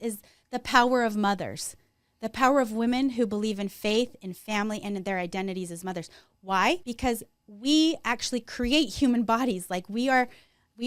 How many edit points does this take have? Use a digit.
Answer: 1